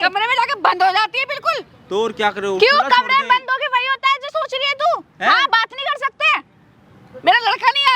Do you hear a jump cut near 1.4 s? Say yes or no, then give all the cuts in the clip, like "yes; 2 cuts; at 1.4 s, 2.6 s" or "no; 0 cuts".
no; 0 cuts